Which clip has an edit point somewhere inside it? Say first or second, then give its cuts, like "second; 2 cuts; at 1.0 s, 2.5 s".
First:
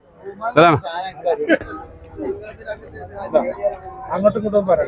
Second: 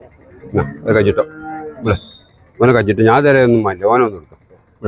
first; 1 cut; at 1.6 s